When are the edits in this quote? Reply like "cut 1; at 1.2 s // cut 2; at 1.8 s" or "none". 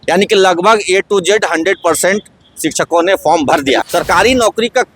cut 1; at 3.8 s